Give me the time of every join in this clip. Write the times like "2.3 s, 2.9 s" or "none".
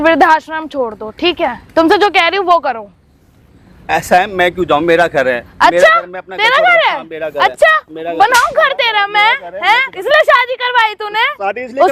none